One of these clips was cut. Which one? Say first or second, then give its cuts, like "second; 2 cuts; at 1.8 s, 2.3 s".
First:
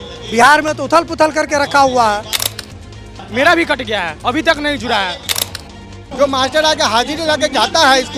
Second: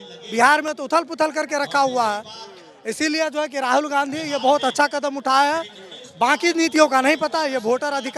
first; 2 cuts; at 2.9 s, 5.4 s